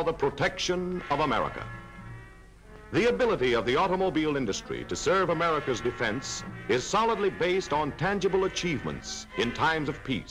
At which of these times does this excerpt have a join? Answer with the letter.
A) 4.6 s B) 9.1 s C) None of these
C